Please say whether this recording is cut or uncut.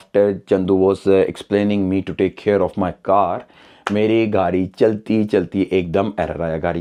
uncut